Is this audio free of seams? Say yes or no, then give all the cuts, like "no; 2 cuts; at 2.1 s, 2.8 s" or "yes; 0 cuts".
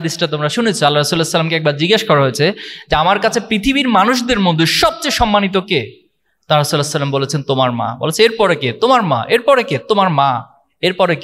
yes; 0 cuts